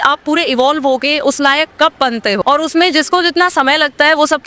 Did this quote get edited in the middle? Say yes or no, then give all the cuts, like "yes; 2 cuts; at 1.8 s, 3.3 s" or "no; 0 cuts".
yes; 1 cut; at 2.4 s